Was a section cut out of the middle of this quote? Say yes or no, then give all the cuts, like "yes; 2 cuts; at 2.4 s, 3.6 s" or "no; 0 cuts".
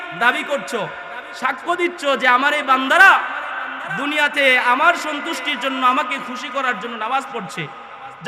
no; 0 cuts